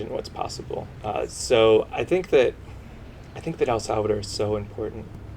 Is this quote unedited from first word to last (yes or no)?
no